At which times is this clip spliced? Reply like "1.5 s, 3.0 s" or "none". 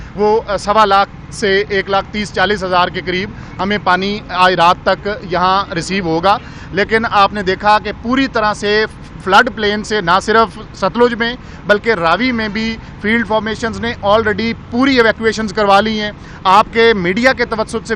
none